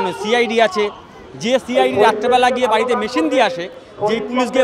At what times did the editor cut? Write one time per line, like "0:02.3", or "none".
none